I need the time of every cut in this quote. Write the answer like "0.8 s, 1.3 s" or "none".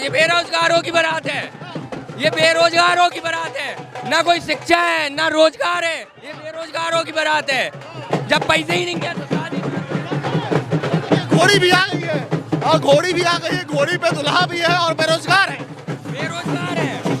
none